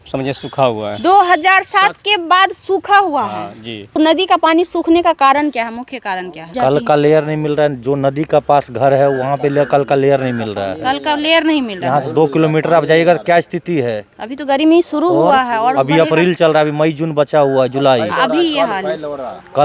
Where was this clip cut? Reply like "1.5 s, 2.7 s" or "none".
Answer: 3.9 s, 6.5 s

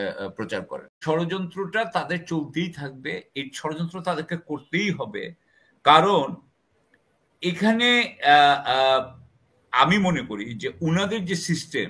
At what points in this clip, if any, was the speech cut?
1.0 s

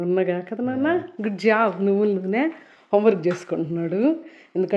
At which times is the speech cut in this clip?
none

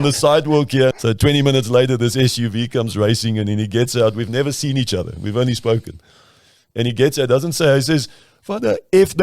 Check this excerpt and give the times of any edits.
1.0 s

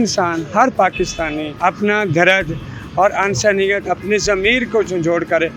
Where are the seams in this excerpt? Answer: none

